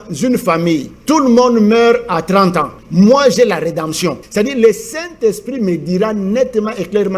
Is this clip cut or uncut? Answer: cut